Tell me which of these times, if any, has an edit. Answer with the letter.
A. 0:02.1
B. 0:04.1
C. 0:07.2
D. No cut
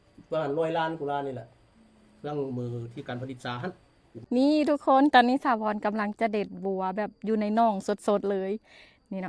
B